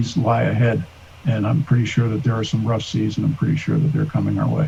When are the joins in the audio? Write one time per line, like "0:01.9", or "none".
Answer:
none